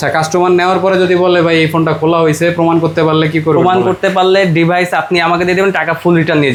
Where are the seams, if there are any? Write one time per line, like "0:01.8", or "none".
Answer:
none